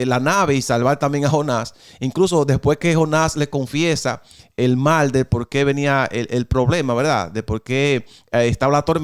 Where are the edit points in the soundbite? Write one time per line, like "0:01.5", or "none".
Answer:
none